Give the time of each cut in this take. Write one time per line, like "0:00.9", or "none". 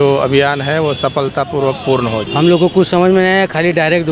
0:02.2